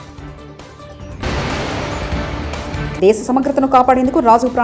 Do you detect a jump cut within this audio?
yes; 2 cuts; at 0.7 s, 2.9 s

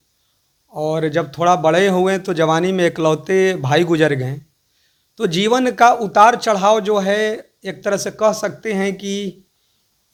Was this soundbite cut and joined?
no; 0 cuts

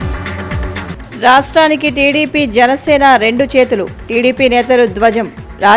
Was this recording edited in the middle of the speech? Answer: yes; 1 cut; at 0.9 s

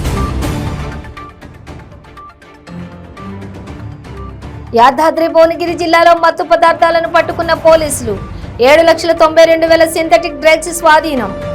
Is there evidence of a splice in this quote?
yes; 2 cuts; at 1.6 s, 4.7 s

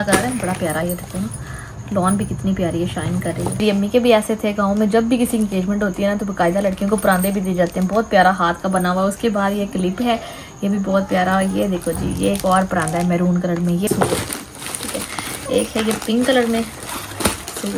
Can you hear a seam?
yes; 2 cuts; at 3.5 s, 13.9 s

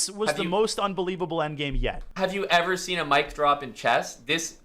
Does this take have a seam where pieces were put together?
yes; 1 cut; at 2.0 s

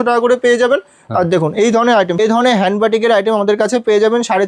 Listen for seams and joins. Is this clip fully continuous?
no; 1 cut; at 2.2 s

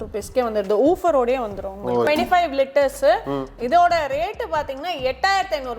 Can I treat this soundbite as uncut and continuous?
no; 1 cut; at 2.1 s

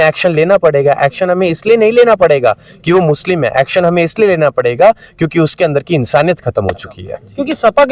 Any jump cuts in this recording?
no; 0 cuts

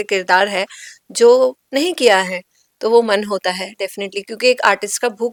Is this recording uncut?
yes; 0 cuts

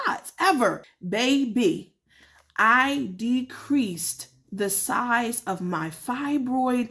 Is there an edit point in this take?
yes; 1 cut; at 0.9 s

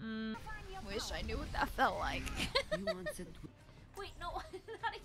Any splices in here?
yes; 1 cut; at 3.4 s

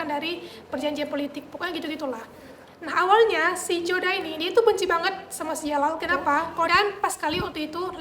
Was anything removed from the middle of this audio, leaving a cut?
yes; 1 cut; at 6.7 s

